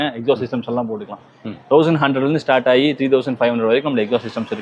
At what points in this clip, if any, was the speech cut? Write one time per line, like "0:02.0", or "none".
none

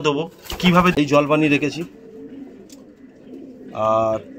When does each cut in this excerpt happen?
0:00.9

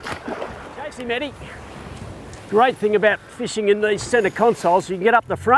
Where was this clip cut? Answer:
0:00.9

